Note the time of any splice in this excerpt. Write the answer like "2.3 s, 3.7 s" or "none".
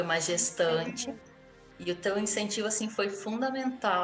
1.3 s